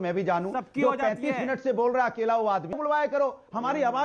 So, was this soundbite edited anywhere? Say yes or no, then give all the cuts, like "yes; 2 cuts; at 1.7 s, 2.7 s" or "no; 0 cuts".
yes; 1 cut; at 2.8 s